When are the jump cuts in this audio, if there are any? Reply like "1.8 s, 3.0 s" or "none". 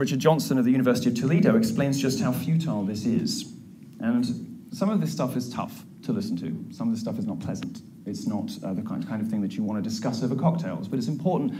5.6 s